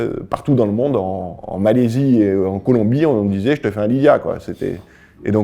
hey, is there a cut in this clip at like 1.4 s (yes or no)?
yes